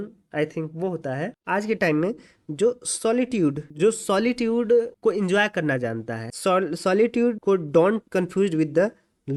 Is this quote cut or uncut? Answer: uncut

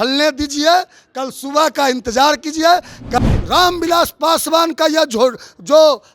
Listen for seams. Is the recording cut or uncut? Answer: cut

